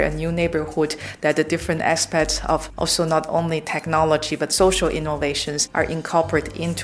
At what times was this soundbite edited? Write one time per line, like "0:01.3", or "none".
0:02.7
0:05.6